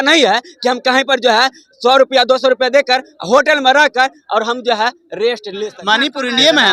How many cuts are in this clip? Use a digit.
1